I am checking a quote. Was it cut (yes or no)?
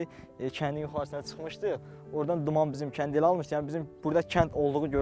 no